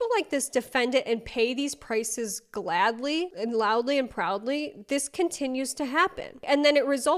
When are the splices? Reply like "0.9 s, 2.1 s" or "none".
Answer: none